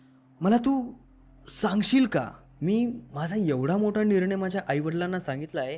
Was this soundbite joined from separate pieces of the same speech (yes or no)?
yes